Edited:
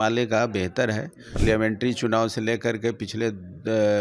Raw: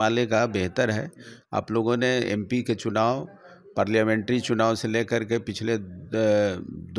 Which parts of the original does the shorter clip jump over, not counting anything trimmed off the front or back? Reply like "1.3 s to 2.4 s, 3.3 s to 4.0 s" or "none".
1.4 s to 3.9 s